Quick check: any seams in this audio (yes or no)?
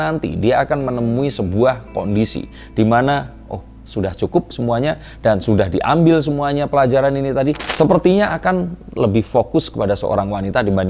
yes